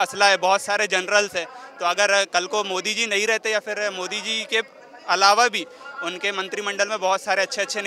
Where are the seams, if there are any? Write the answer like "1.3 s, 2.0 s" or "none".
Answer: none